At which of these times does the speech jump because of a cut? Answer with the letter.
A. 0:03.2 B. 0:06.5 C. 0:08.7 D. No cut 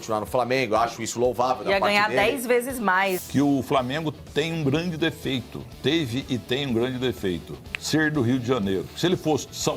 A